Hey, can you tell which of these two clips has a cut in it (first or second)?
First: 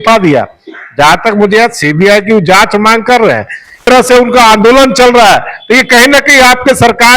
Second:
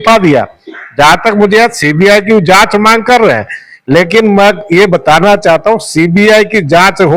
first